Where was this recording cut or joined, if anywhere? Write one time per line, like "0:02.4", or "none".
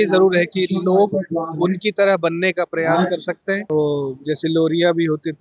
0:03.6